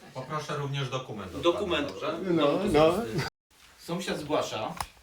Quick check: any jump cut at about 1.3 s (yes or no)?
no